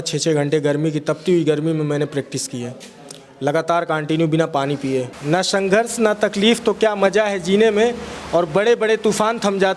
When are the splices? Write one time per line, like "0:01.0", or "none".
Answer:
0:05.1